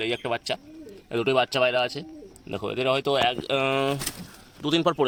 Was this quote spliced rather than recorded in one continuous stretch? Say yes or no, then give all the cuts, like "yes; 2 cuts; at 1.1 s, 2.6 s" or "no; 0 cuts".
no; 0 cuts